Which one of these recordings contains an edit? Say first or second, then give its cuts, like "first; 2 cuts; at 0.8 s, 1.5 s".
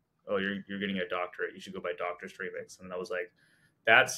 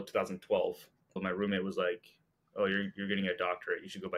second; 1 cut; at 1.2 s